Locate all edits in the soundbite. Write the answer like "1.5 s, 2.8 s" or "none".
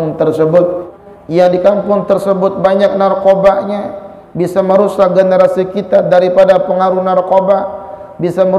0.9 s